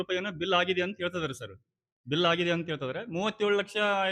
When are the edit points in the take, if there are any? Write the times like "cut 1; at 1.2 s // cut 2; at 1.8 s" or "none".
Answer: none